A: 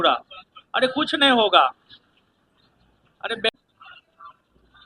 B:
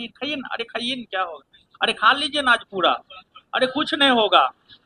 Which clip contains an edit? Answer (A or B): A